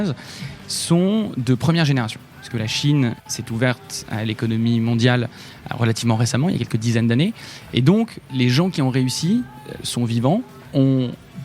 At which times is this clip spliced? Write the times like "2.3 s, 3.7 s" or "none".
3.2 s, 8.2 s, 10.8 s